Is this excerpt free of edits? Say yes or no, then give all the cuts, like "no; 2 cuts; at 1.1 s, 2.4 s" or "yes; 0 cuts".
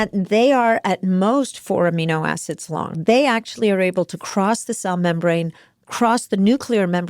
no; 1 cut; at 3.0 s